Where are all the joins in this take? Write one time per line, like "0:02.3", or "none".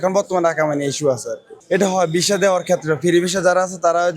0:01.5